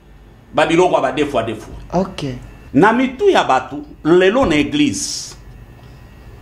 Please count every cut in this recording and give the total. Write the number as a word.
one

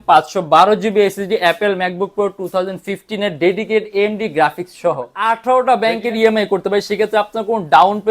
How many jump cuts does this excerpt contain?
one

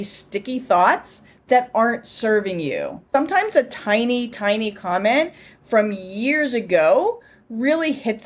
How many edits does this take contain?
one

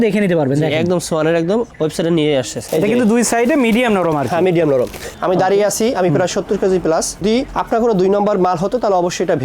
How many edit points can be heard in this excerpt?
three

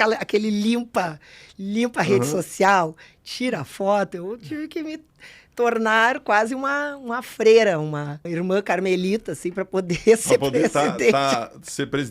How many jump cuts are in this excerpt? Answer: one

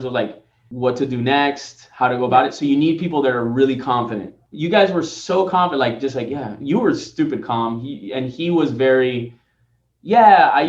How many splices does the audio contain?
zero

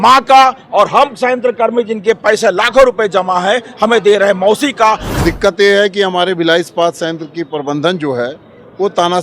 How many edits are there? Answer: one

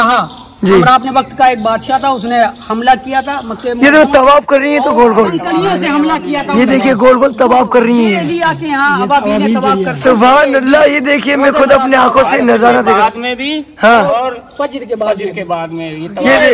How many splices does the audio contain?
zero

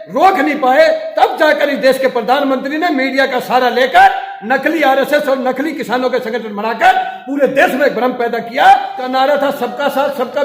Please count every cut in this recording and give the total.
one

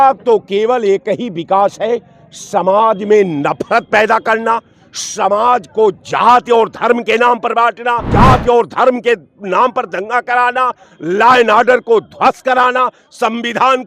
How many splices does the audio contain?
one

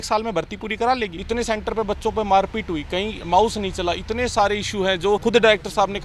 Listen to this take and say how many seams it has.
three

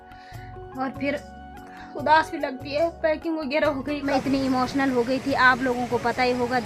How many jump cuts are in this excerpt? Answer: one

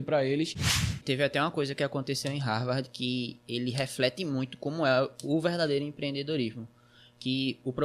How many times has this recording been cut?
one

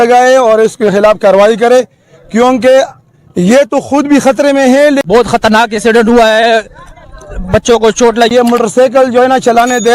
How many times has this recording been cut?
two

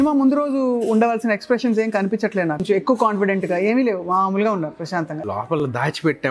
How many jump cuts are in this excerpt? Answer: two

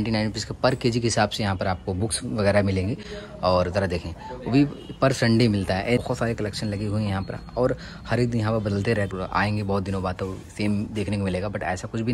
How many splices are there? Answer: zero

